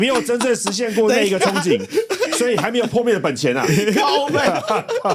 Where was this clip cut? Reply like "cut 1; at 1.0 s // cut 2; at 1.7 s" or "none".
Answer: none

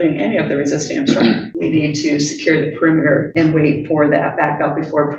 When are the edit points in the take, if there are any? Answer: cut 1; at 1.5 s // cut 2; at 3.3 s

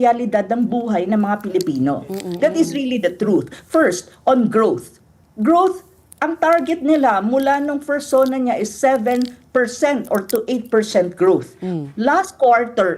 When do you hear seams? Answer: none

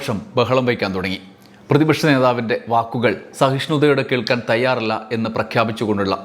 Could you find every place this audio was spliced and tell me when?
none

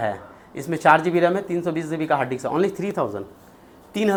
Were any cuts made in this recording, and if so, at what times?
none

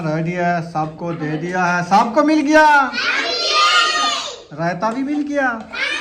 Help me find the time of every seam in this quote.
none

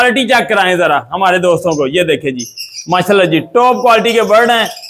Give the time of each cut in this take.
none

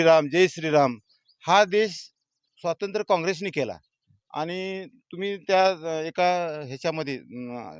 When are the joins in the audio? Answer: none

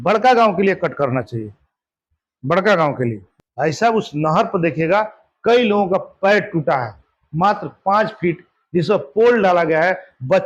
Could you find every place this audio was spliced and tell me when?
cut 1; at 3.2 s

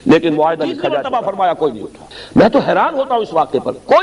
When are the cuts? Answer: cut 1; at 0.9 s

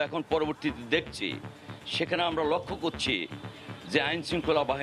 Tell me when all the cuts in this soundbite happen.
none

